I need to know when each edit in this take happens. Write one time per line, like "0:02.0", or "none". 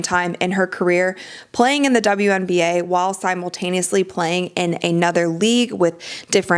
none